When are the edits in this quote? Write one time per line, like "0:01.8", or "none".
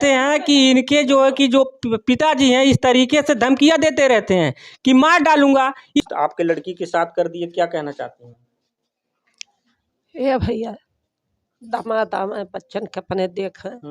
0:06.0